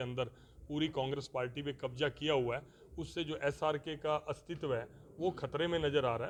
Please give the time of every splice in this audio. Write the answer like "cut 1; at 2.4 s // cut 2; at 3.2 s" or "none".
none

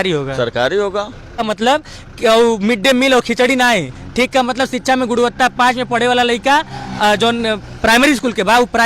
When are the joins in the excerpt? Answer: cut 1; at 1.4 s

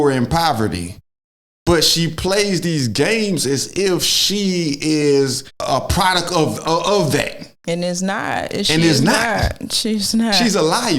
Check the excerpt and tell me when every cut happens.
cut 1; at 5.5 s

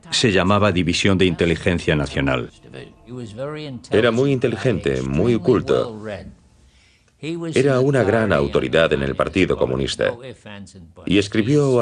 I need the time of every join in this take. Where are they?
cut 1; at 9.0 s

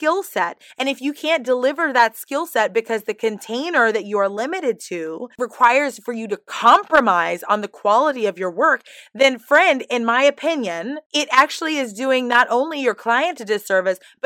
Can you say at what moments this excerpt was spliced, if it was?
cut 1; at 5.3 s // cut 2; at 10.9 s

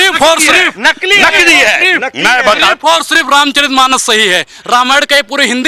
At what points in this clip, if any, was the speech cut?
none

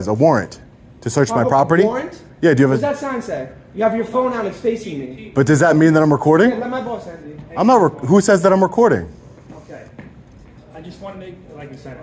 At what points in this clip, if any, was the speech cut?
none

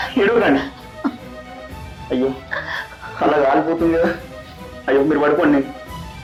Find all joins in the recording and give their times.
none

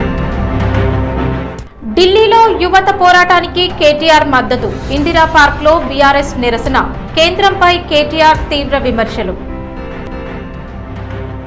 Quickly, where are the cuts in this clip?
cut 1; at 1.5 s

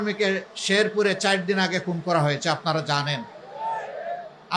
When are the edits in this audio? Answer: none

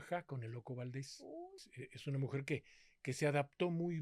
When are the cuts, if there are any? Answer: cut 1; at 1.6 s

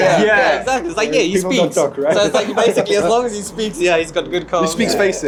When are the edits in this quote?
none

